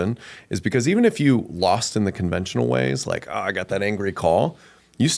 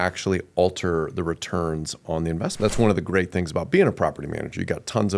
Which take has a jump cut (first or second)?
second